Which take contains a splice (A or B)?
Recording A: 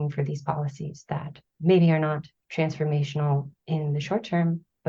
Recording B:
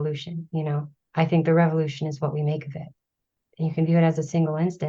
A